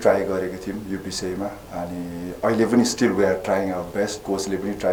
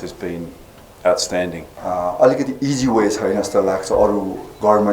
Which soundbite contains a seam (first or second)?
second